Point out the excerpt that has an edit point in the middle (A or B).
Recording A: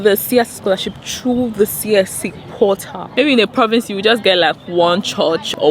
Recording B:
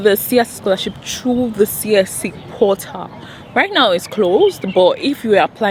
A